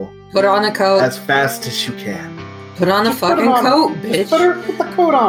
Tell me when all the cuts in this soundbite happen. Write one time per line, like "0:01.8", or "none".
none

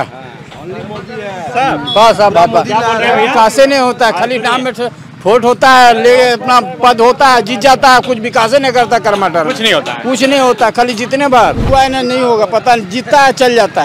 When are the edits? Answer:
0:11.6

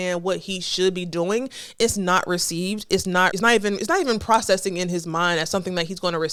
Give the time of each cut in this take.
none

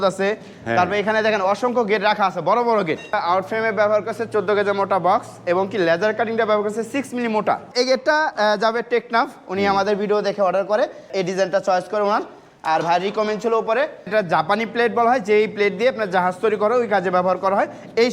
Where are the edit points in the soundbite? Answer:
0:03.2
0:07.7
0:11.1
0:14.1

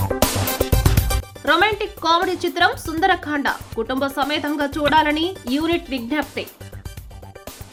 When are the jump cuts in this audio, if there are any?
none

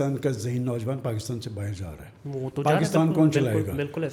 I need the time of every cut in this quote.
none

